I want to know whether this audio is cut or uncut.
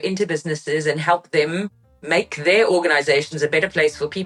uncut